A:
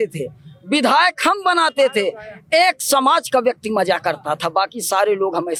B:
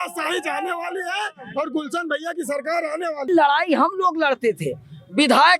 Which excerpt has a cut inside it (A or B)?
B